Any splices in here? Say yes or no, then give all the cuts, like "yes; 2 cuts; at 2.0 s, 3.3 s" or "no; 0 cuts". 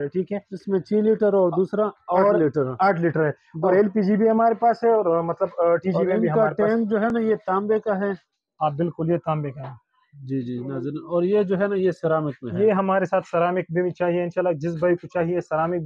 no; 0 cuts